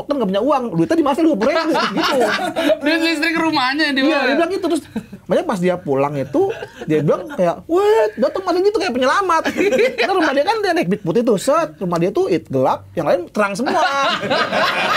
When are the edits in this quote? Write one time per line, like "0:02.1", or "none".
none